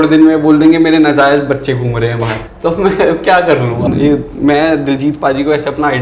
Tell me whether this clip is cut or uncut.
cut